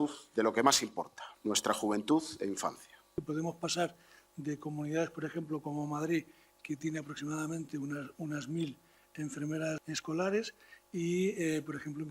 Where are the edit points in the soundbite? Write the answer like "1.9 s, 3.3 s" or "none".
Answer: 1.2 s, 3.2 s, 9.8 s